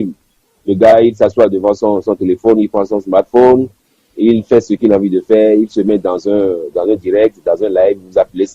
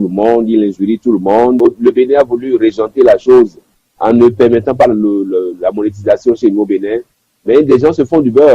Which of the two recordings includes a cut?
second; 1 cut; at 1.6 s

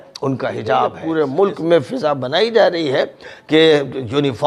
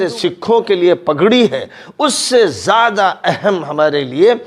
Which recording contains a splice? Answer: first; 1 cut; at 1.0 s

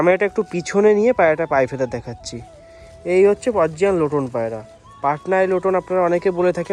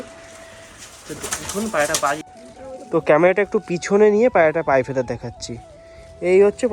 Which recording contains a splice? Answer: second; 1 cut; at 2.2 s

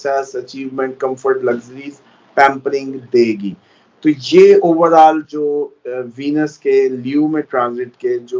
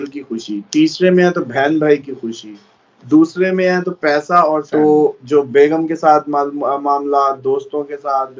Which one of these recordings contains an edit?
second; 1 cut; at 4.7 s

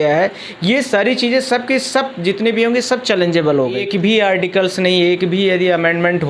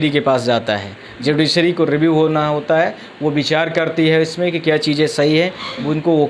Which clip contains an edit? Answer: first; 1 cut; at 3.8 s

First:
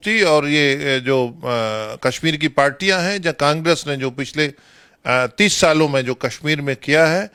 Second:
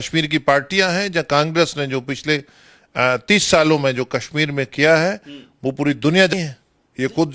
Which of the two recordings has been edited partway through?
second; 1 cut; at 6.3 s

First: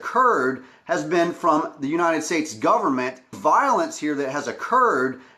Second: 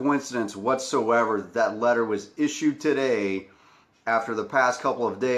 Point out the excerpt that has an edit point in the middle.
first; 1 cut; at 3.4 s

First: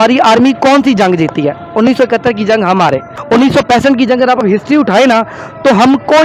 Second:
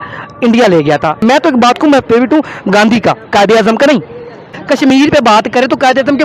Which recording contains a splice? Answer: second; 2 cuts; at 1.2 s, 4.6 s

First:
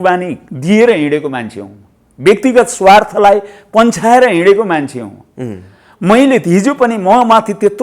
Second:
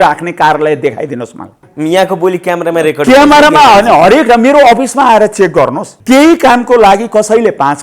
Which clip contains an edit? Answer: second; 2 cuts; at 1.7 s, 5.9 s

